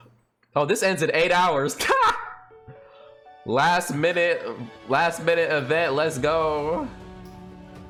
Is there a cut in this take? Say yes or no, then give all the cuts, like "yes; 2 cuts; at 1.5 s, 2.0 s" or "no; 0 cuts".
no; 0 cuts